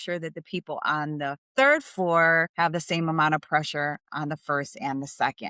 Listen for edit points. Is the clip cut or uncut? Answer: cut